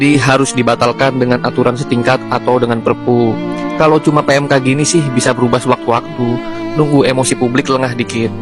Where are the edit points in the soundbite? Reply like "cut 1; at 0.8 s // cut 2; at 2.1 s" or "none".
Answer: none